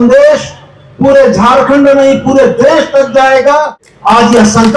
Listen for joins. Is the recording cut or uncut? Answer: cut